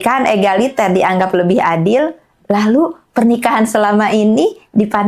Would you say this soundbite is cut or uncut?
uncut